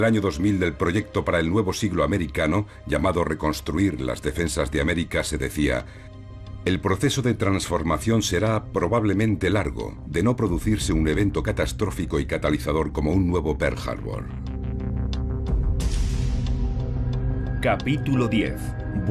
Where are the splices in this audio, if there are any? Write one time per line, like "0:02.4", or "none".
0:01.1